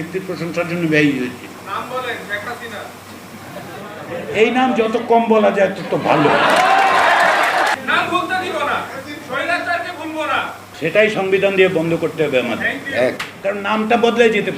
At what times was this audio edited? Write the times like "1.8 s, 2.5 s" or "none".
1.6 s, 7.8 s, 10.6 s, 13.3 s